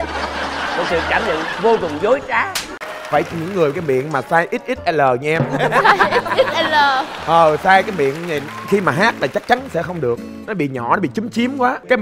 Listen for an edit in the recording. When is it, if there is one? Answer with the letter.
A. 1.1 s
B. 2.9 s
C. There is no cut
B